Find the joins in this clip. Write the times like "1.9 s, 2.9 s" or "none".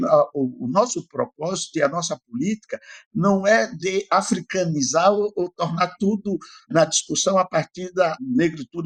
none